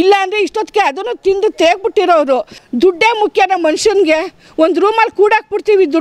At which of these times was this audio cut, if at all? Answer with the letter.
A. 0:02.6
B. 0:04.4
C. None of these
A